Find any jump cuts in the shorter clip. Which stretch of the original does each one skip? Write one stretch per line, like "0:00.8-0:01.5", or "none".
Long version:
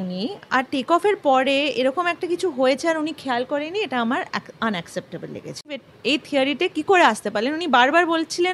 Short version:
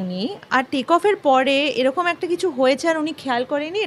none